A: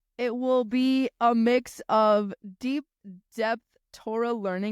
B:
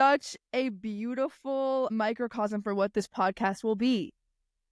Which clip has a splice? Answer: B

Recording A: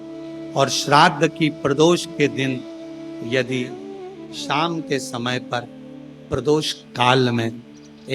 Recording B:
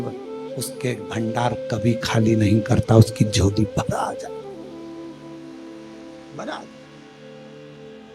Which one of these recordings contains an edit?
B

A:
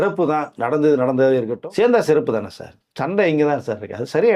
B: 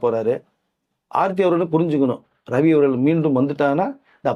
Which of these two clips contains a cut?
A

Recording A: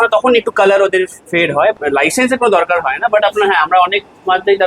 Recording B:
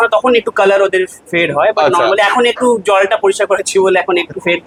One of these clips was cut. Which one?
A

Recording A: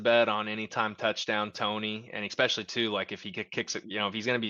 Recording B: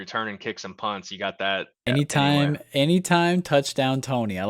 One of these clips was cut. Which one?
B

